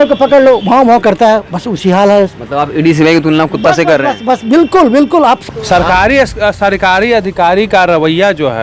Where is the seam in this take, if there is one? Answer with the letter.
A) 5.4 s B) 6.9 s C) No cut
A